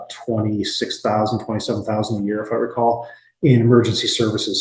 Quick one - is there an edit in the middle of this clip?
no; 0 cuts

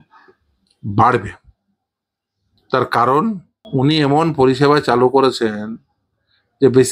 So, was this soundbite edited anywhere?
yes; 1 cut; at 3.5 s

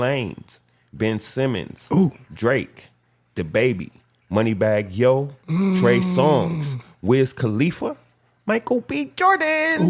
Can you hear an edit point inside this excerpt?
no; 0 cuts

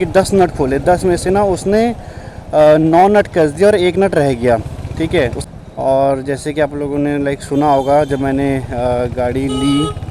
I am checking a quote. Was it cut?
yes; 1 cut; at 5.4 s

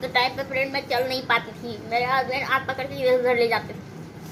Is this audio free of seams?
yes; 0 cuts

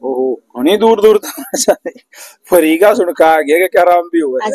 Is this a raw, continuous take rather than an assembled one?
yes; 0 cuts

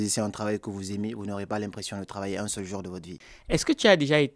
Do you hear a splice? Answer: yes; 1 cut; at 3.2 s

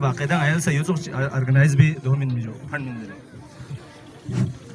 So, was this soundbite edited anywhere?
no; 0 cuts

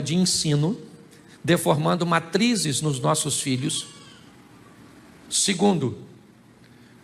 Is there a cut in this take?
no; 0 cuts

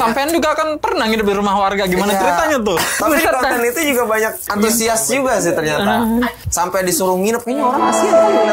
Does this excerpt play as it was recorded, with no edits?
no; 3 cuts; at 3.0 s, 4.4 s, 6.4 s

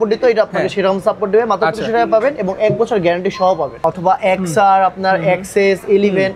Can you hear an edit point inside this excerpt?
yes; 1 cut; at 3.8 s

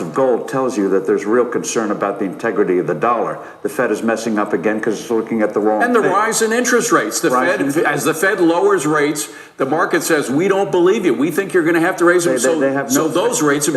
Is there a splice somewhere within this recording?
no; 0 cuts

